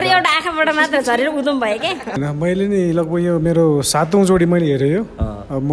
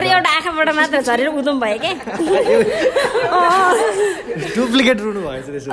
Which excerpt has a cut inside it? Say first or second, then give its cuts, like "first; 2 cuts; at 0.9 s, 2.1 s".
first; 1 cut; at 2.2 s